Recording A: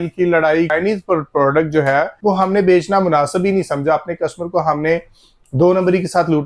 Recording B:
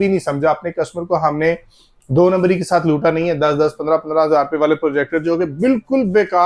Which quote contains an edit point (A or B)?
A